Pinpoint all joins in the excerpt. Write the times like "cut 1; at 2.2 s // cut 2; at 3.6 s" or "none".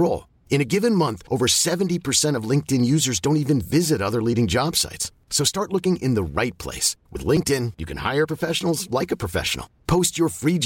none